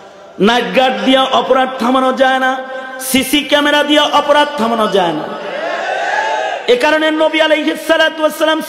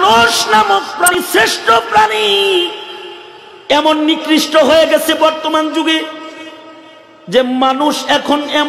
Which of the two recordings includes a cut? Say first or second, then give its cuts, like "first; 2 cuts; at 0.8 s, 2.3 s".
second; 1 cut; at 1.1 s